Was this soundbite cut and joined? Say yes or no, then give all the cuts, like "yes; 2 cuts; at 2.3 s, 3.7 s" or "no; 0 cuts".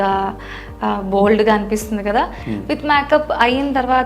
yes; 1 cut; at 2.5 s